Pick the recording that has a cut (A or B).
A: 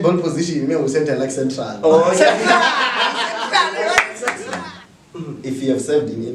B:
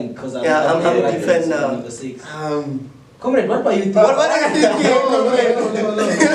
A